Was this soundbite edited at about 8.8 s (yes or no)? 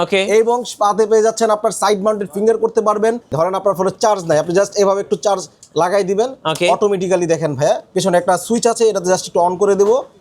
no